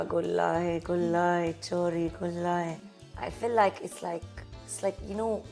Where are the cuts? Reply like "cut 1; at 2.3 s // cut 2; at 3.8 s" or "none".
none